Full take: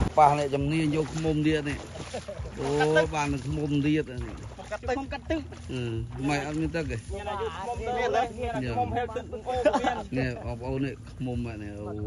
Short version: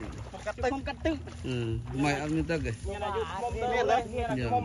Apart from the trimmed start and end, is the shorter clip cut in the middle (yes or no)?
no